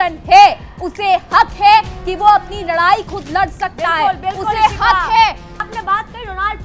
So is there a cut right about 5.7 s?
yes; 1 cut; at 5.7 s

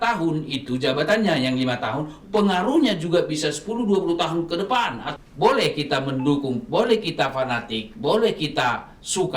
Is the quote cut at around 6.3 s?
no; 1 cut; at 5.0 s

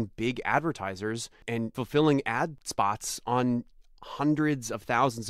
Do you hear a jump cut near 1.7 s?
yes; 2 cuts; at 1.7 s, 2.6 s

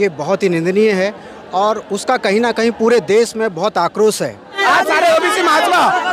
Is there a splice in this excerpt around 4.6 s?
yes; 1 cut; at 4.6 s

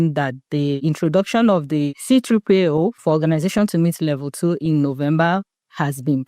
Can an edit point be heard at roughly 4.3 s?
no; 3 cuts; at 0.8 s, 2.0 s, 3.0 s

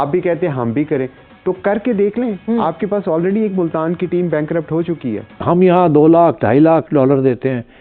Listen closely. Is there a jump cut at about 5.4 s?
yes; 1 cut; at 5.4 s

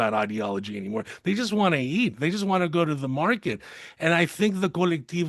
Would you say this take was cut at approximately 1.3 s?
no; 0 cuts

